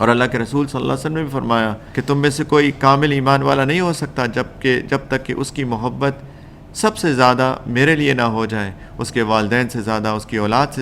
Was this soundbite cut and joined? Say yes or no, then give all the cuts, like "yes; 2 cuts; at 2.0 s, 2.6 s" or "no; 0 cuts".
yes; 1 cut; at 1.8 s